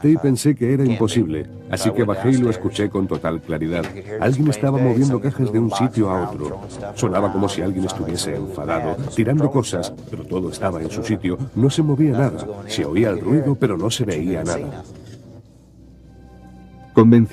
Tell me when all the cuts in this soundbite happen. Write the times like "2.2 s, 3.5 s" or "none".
15.8 s

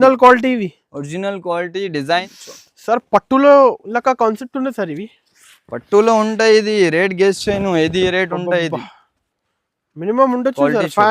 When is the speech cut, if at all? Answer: 2.3 s

